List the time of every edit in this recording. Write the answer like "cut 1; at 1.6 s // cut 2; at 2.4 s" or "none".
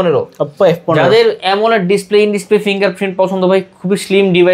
none